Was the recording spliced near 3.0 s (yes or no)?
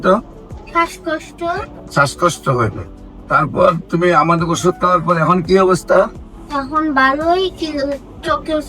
no